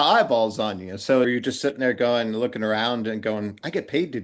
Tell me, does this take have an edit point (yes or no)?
yes